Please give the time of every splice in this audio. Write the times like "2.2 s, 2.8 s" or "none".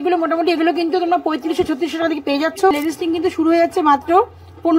2.7 s